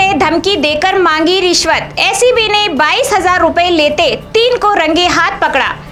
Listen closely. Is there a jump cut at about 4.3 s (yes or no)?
no